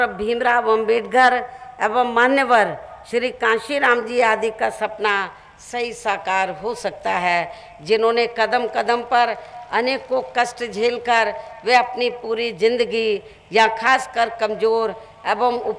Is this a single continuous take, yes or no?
yes